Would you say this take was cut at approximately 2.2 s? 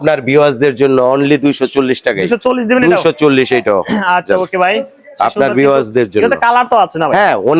no; 0 cuts

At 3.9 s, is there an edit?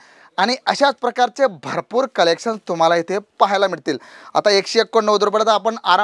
no; 0 cuts

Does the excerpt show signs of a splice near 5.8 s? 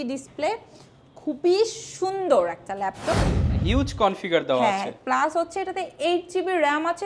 no; 1 cut; at 3.3 s

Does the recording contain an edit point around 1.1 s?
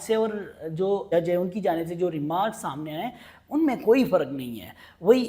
yes; 1 cut; at 1.1 s

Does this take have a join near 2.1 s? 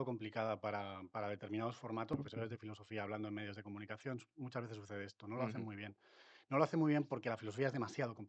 yes; 1 cut; at 2.1 s

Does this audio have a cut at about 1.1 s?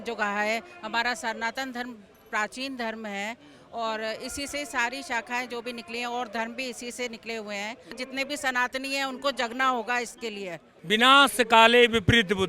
no; 2 cuts; at 8.0 s, 10.7 s

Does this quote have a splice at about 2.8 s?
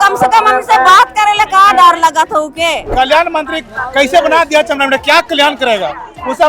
yes; 1 cut; at 2.8 s

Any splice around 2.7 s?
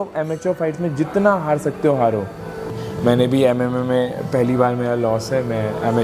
yes; 1 cut; at 2.7 s

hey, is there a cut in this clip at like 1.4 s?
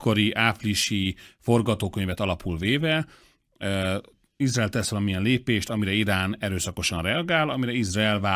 no; 0 cuts

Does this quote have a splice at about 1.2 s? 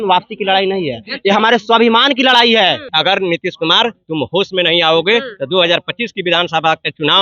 no; 1 cut; at 2.9 s

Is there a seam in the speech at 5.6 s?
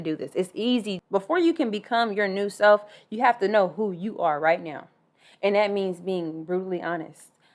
no; 1 cut; at 1.0 s

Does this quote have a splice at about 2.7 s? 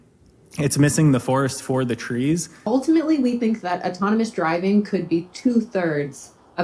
yes; 1 cut; at 2.7 s

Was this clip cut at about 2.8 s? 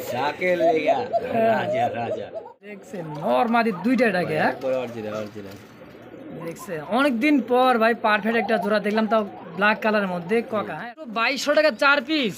yes; 2 cuts; at 2.8 s, 11.4 s

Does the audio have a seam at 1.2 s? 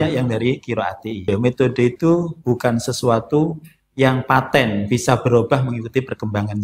yes; 1 cut; at 1.2 s

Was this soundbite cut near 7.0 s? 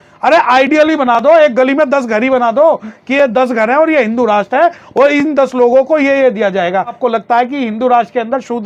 yes; 1 cut; at 7.0 s

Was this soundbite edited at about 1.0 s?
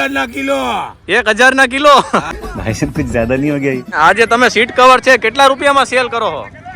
no; 2 cuts; at 2.3 s, 3.9 s

